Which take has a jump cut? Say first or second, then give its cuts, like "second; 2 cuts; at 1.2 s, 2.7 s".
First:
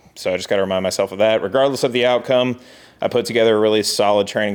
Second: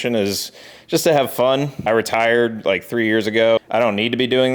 second; 2 cuts; at 1.8 s, 3.6 s